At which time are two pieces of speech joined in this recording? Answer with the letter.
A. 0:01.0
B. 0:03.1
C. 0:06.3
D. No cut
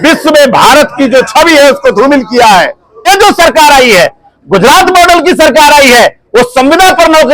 B